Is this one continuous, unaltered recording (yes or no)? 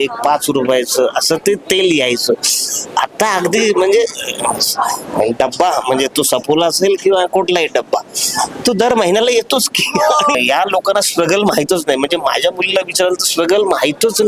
no